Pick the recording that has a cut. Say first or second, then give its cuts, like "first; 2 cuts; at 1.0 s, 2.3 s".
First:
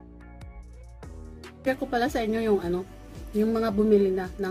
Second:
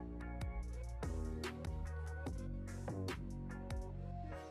first; 1 cut; at 1.6 s